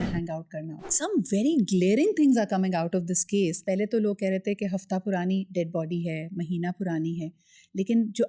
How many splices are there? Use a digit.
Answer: 2